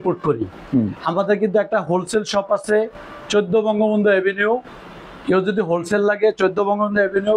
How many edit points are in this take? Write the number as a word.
zero